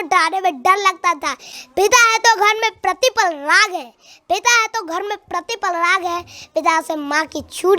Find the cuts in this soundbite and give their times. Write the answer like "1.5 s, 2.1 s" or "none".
1.5 s